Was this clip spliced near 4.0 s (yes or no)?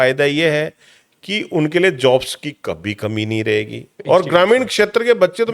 yes